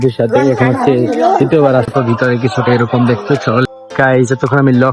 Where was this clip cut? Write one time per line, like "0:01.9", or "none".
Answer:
0:01.9
0:03.6